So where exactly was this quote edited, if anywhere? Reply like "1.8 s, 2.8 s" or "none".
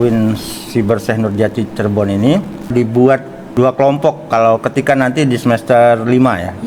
2.7 s, 3.4 s